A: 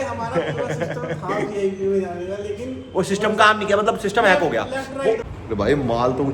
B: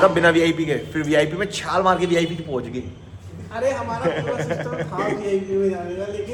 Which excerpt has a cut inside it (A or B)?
A